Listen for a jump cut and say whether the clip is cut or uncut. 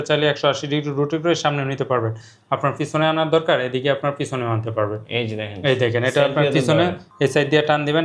cut